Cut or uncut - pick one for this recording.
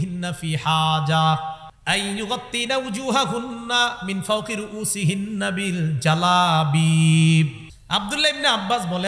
cut